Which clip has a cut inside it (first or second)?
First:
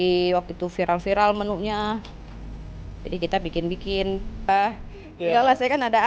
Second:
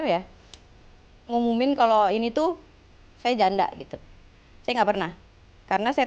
first